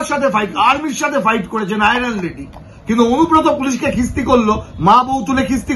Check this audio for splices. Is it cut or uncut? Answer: uncut